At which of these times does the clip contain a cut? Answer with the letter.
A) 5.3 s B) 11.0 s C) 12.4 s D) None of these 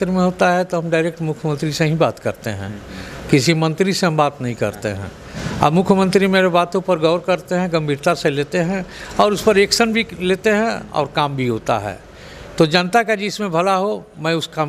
D